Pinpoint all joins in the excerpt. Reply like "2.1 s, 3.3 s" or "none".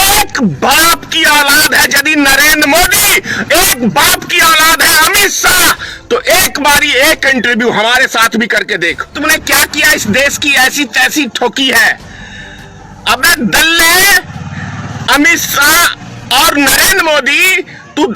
9.1 s